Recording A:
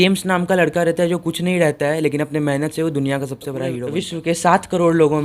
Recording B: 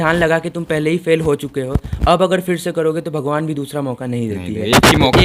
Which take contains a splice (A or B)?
A